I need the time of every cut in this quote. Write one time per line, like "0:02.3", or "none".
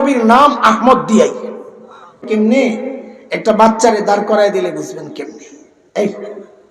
0:02.2